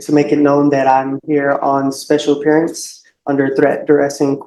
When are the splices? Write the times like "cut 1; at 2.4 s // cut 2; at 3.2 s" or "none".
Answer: none

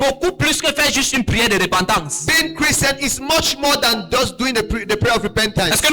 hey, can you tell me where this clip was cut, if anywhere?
none

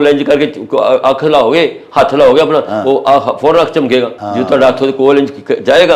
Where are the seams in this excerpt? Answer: cut 1; at 4.2 s

